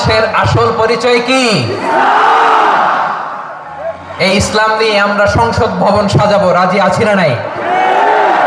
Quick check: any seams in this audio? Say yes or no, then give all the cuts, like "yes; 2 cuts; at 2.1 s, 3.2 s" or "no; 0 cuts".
no; 0 cuts